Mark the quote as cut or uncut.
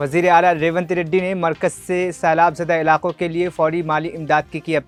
uncut